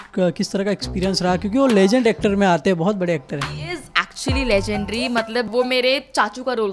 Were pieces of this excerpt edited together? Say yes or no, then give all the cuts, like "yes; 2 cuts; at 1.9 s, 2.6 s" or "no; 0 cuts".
yes; 1 cut; at 5.5 s